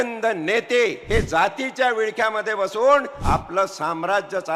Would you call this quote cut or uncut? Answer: cut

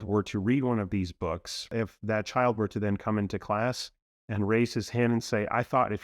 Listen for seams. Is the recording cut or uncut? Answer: cut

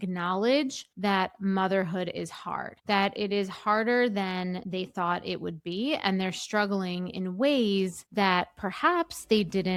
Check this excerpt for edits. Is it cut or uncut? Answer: uncut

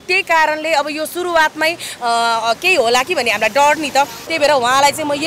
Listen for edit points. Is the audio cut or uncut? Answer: cut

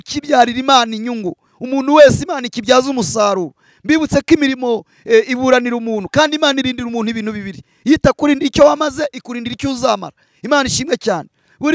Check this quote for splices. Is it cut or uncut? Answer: uncut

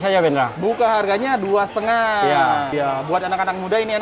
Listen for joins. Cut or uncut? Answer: cut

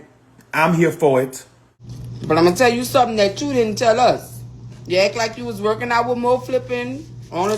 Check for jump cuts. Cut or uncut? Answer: cut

